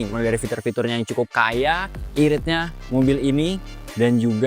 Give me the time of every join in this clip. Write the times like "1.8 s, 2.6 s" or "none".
2.0 s